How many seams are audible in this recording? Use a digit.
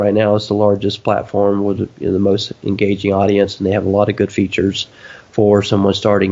0